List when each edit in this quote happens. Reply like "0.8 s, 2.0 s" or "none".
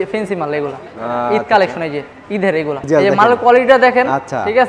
2.9 s